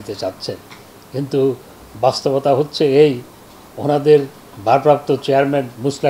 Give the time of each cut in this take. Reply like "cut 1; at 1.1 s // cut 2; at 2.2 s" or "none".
none